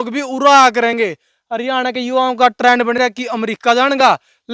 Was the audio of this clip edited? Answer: no; 0 cuts

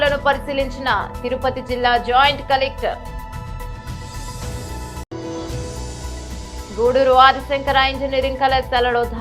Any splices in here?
yes; 2 cuts; at 3.2 s, 5.1 s

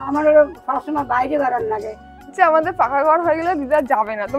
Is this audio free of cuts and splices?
no; 1 cut; at 2.3 s

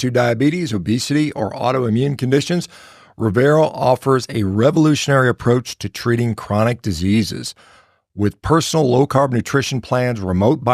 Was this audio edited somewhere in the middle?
no; 0 cuts

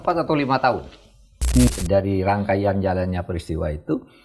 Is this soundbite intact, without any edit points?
no; 1 cut; at 1.7 s

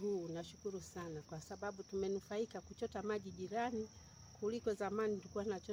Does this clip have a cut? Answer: no; 0 cuts

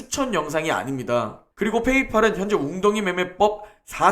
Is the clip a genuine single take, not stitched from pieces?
no; 1 cut; at 1.4 s

